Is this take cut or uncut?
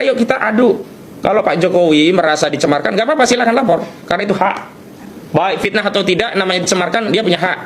uncut